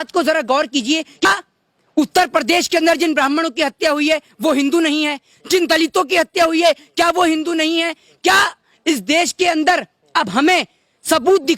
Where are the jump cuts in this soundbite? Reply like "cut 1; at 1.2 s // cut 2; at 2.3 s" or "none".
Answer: cut 1; at 1.2 s